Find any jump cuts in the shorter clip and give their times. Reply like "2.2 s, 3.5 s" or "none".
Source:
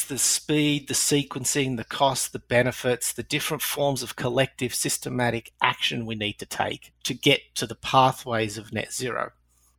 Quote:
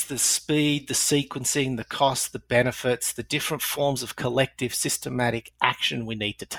none